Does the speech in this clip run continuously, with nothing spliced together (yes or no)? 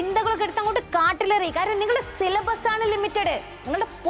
yes